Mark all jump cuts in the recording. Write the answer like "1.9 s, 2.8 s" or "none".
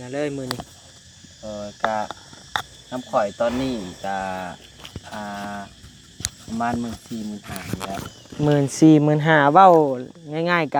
none